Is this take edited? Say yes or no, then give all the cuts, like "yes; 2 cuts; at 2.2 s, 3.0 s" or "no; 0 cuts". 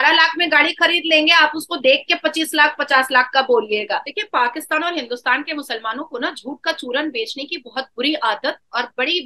yes; 1 cut; at 4.1 s